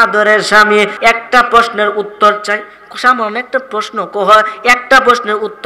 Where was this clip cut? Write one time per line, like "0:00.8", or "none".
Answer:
0:00.9